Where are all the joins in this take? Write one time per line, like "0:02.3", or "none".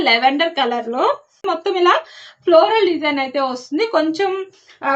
0:01.4